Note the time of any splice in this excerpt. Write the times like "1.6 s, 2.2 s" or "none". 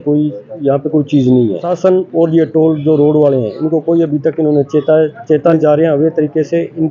1.7 s, 5.6 s